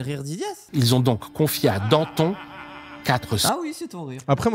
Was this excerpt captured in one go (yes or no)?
yes